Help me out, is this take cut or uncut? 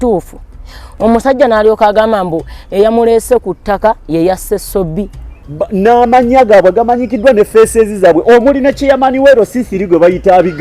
cut